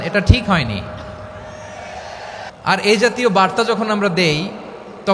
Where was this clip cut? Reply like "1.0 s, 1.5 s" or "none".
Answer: 2.5 s